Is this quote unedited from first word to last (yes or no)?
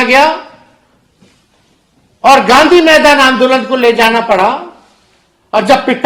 yes